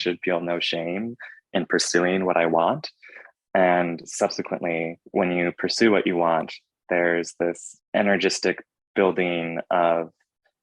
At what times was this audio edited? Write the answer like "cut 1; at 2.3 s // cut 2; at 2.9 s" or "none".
cut 1; at 5.0 s // cut 2; at 7.7 s